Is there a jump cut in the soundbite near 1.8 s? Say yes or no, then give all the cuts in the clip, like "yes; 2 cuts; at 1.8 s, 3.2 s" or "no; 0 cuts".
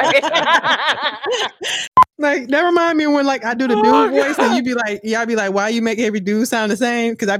yes; 1 cut; at 1.8 s